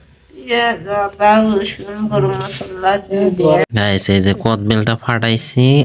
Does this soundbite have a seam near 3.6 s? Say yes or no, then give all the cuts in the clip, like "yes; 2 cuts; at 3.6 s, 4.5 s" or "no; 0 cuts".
yes; 1 cut; at 3.6 s